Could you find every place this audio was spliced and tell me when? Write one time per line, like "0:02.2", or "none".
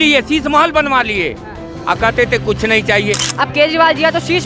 0:03.3